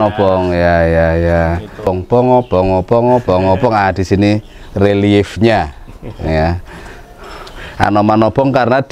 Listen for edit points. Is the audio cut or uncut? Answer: cut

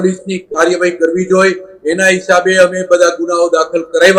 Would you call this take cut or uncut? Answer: uncut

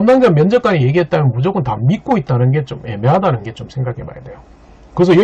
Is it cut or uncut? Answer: uncut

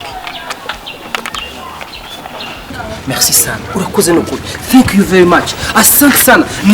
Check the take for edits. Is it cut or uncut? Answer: cut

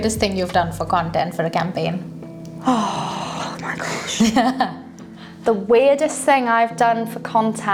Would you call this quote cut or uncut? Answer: uncut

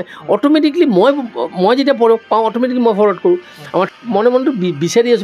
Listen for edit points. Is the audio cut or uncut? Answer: cut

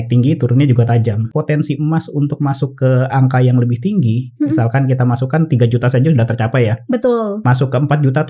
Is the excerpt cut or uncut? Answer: cut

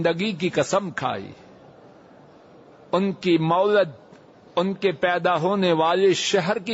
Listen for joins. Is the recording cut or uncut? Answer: uncut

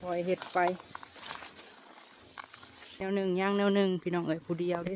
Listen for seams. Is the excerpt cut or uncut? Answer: cut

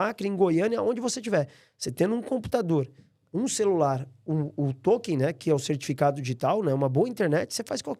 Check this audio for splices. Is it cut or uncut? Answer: uncut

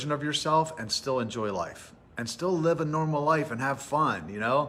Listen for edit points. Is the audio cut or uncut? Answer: uncut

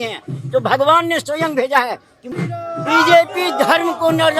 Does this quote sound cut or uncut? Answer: cut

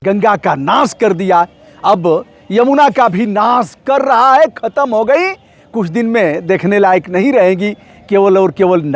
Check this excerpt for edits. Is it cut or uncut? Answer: uncut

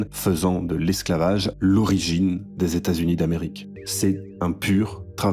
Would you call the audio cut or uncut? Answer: cut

